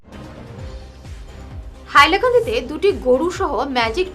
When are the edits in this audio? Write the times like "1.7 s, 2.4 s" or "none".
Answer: 1.0 s